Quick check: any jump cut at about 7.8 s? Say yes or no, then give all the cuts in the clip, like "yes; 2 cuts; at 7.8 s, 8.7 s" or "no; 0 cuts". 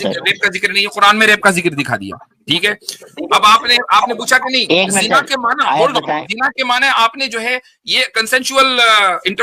no; 0 cuts